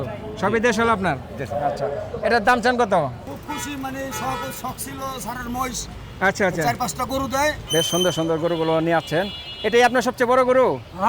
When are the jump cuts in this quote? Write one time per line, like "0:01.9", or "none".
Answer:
0:03.2
0:07.6